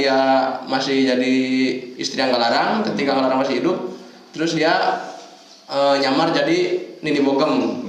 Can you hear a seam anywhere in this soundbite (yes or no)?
no